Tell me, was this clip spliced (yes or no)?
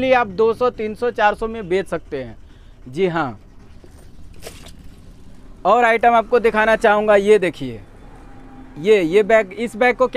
no